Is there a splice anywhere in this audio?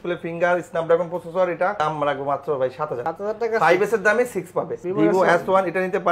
yes; 2 cuts; at 1.7 s, 4.8 s

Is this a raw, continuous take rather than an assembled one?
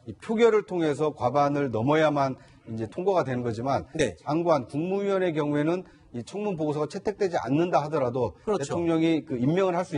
no; 1 cut; at 4.7 s

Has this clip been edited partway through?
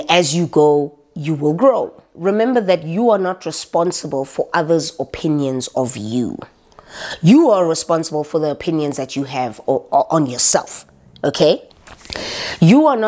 no; 0 cuts

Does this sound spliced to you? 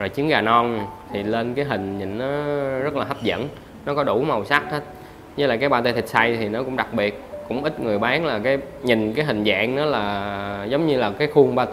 no; 0 cuts

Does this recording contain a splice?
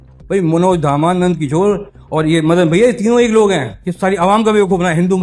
no; 0 cuts

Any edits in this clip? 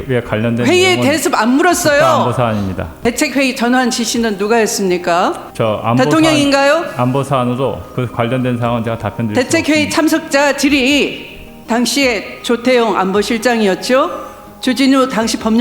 yes; 2 cuts; at 3.0 s, 5.5 s

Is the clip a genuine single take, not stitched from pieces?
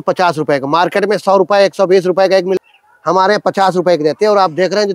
no; 1 cut; at 2.6 s

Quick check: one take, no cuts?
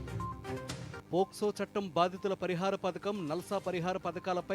no; 1 cut; at 0.9 s

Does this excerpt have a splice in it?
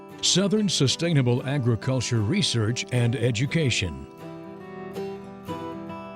yes; 1 cut; at 4.0 s

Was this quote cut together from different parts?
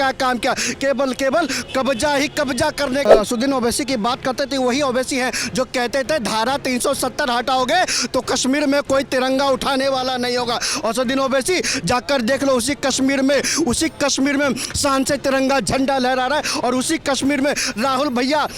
yes; 1 cut; at 3.1 s

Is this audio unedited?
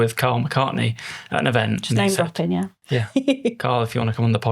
no; 1 cut; at 2.8 s

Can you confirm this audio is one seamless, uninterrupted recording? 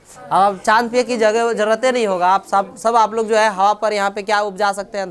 yes; 0 cuts

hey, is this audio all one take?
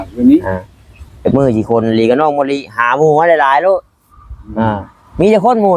yes; 0 cuts

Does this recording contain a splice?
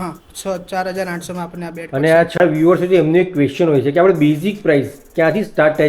yes; 1 cut; at 2.4 s

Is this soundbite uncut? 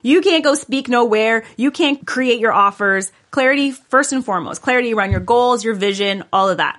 no; 1 cut; at 2.0 s

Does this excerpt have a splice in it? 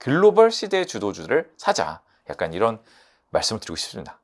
no; 0 cuts

